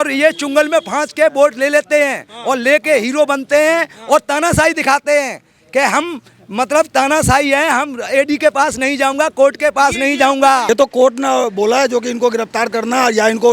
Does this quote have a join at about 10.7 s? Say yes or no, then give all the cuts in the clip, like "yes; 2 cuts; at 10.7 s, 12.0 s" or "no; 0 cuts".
yes; 1 cut; at 10.7 s